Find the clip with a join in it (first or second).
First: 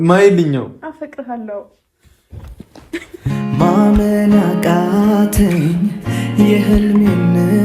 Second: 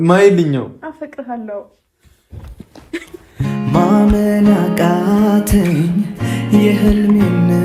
first